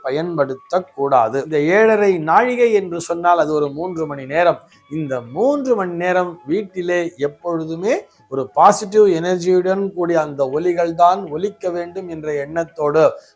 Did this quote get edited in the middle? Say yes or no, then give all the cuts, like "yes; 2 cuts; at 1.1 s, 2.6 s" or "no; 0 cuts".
yes; 1 cut; at 1.4 s